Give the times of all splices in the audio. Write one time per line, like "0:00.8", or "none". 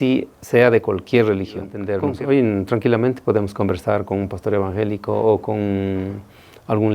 0:01.8